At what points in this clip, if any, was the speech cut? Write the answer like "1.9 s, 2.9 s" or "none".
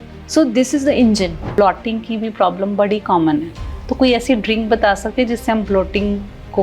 1.5 s